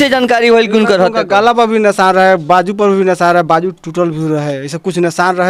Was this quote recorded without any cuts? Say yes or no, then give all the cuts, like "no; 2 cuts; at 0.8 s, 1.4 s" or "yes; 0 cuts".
yes; 0 cuts